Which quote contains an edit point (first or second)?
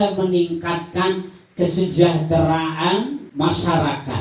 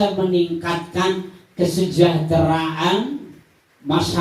first